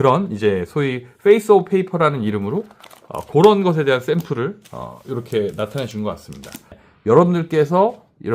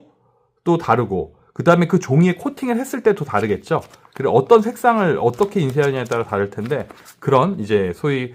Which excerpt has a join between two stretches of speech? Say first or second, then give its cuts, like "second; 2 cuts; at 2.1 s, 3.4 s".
first; 1 cut; at 6.8 s